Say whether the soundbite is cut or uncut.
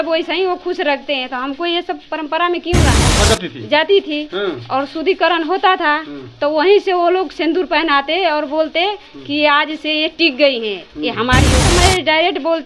cut